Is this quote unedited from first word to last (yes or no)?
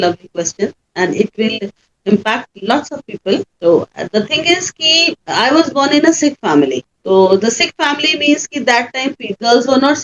yes